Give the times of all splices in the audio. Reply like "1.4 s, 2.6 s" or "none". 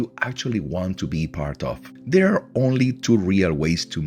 1.9 s